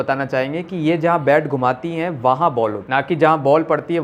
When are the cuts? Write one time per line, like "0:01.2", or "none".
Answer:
none